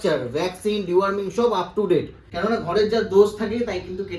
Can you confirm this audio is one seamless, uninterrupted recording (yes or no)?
no